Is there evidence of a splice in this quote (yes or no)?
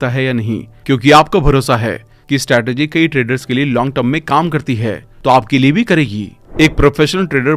yes